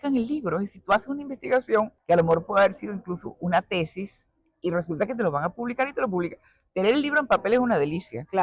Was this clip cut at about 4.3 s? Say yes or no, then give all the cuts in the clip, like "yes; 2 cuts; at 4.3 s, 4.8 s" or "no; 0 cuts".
no; 1 cut; at 2.0 s